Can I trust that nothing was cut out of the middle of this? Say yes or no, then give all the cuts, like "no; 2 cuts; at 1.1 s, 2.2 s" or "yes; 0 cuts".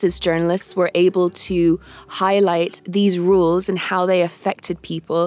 yes; 0 cuts